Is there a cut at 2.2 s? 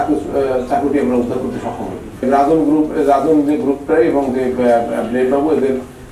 yes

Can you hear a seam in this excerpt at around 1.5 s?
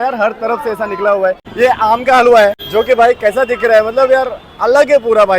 yes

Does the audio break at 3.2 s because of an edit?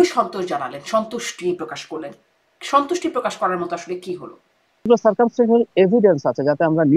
no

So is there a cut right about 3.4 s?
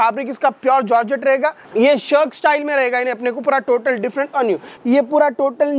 no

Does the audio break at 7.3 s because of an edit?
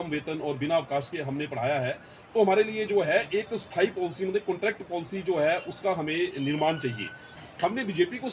yes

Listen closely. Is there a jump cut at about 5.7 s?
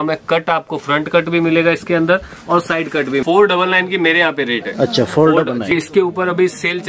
yes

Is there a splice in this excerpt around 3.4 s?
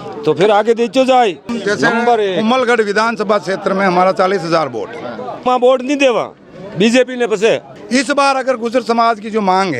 no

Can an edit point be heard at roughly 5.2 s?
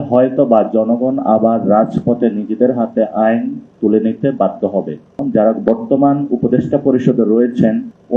yes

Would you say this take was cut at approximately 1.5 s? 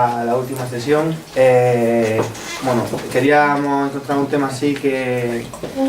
no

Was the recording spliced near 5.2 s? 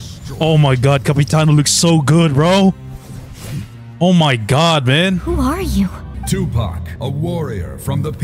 yes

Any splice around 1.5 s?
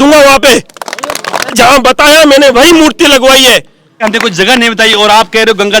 yes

